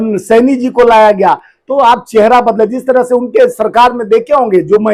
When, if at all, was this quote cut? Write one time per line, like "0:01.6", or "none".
none